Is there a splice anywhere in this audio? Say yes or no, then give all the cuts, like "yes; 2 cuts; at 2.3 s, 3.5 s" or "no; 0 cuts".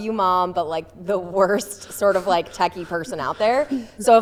no; 0 cuts